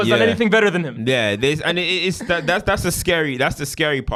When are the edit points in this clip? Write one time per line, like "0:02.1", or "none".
none